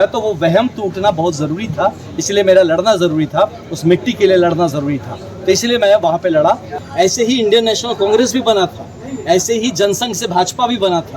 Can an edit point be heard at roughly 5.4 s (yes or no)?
no